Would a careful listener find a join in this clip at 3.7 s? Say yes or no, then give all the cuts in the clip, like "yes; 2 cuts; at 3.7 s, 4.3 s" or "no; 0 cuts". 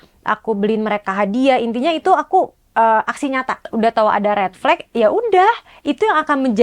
yes; 1 cut; at 3.7 s